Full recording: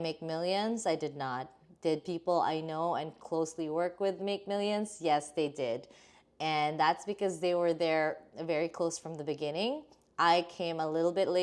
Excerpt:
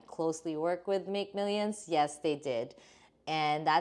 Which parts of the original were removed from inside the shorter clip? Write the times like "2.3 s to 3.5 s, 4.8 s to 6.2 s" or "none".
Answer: none